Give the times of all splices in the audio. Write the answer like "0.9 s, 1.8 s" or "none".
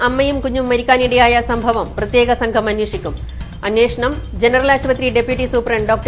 none